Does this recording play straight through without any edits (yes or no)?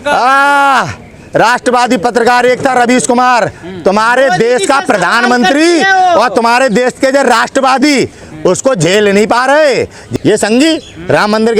no